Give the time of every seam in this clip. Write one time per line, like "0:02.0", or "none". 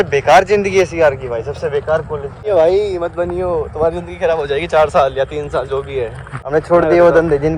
0:02.5
0:06.4